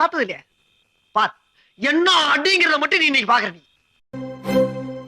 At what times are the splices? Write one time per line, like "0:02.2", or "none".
0:04.1